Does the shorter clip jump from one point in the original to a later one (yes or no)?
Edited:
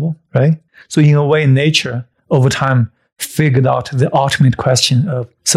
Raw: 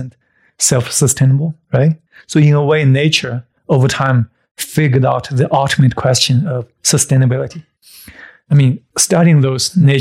no